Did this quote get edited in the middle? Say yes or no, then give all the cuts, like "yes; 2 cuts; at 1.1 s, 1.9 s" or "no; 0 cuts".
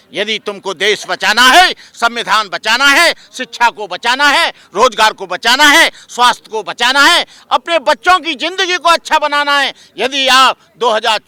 no; 0 cuts